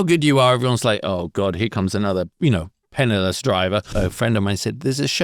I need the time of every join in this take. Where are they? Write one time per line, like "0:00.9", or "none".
0:02.3
0:03.9